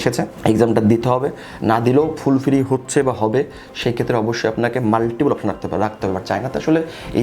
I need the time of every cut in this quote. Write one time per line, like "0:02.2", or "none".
none